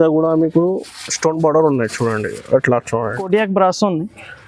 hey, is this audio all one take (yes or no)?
no